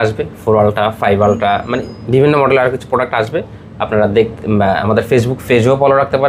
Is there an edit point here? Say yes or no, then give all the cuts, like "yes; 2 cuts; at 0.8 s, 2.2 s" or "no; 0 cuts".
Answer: no; 0 cuts